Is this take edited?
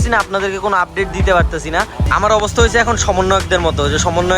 yes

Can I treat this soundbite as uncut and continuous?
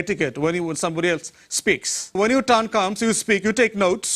no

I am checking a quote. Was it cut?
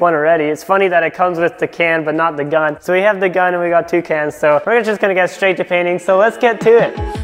no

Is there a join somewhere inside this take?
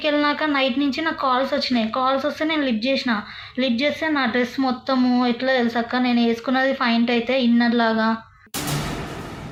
no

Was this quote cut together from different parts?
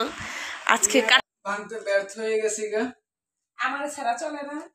yes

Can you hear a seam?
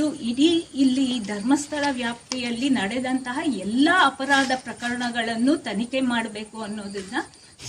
no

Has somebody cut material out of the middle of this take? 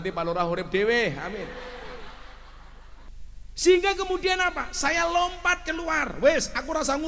yes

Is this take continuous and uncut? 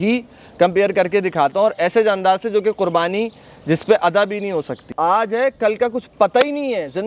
no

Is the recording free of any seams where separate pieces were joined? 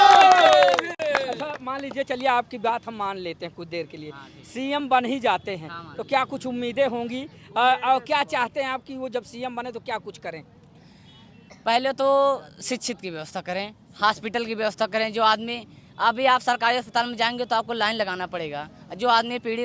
yes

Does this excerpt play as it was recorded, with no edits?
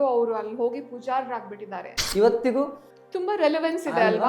no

